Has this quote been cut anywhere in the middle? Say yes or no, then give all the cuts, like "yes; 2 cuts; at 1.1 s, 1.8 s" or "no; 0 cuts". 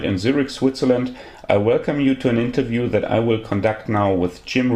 no; 0 cuts